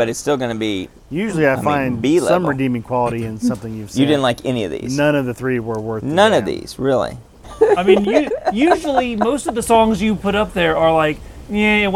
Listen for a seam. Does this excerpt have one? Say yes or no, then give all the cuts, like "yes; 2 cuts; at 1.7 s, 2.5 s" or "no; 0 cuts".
yes; 1 cut; at 7.4 s